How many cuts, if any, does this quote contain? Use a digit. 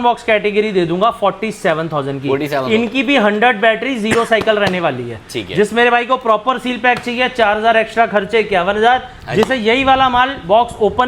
0